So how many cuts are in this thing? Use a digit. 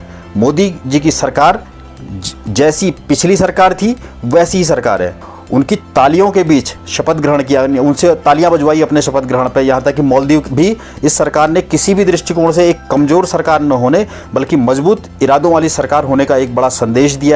2